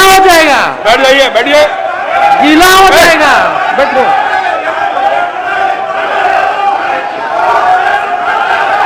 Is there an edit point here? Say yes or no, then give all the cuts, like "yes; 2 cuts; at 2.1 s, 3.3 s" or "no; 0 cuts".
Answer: no; 0 cuts